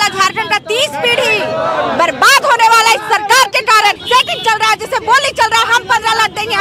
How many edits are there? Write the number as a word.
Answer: one